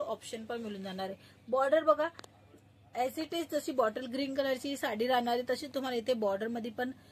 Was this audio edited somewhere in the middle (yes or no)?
no